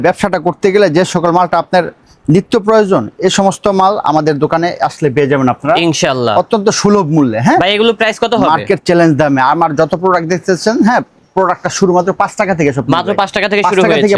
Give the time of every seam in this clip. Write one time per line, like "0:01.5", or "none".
none